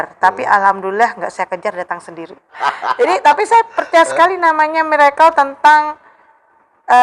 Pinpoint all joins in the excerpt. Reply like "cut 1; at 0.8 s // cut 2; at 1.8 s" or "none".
cut 1; at 2.6 s